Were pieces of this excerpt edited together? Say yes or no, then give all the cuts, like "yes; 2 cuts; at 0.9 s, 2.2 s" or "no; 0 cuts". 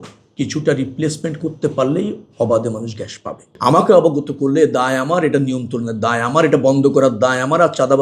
yes; 1 cut; at 3.4 s